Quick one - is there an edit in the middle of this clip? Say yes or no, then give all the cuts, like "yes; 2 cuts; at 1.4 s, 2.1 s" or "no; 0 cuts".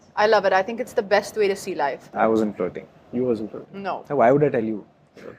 yes; 1 cut; at 2.1 s